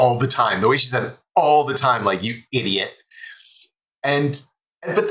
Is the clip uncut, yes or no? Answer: yes